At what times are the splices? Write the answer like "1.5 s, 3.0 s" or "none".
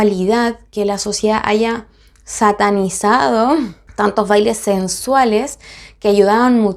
none